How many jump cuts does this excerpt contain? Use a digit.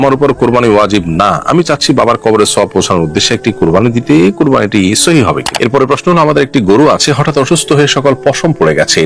1